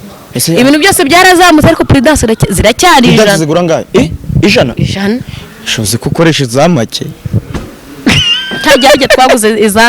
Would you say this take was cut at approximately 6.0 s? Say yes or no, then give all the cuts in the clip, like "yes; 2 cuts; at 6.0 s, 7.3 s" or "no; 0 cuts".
no; 0 cuts